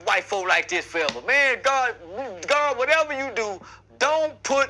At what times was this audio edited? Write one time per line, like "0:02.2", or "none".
none